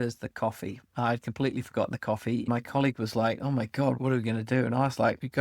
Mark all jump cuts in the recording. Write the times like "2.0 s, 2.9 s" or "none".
2.5 s